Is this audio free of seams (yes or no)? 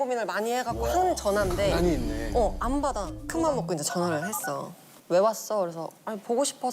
no